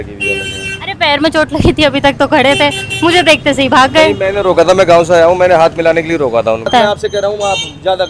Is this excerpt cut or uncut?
cut